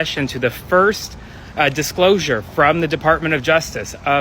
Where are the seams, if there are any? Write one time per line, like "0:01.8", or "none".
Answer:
none